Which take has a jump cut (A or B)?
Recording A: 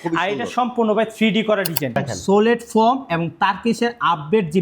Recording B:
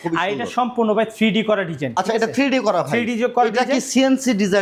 A